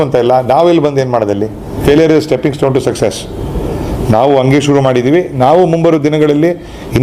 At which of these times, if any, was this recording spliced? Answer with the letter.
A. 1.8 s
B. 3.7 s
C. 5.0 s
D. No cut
A